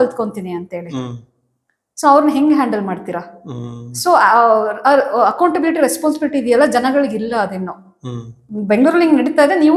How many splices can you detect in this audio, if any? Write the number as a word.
zero